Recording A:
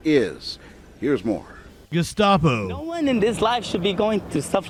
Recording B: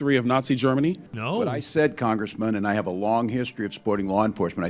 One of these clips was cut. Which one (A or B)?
B